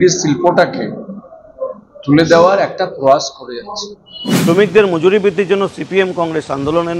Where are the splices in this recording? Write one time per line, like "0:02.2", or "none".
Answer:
0:04.1